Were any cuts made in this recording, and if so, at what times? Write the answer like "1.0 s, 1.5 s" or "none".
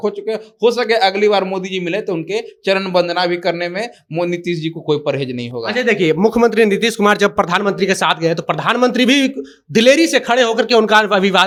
none